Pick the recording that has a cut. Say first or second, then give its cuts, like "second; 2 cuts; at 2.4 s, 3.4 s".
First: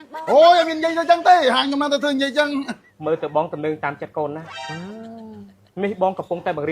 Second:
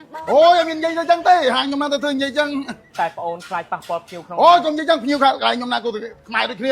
first; 1 cut; at 2.8 s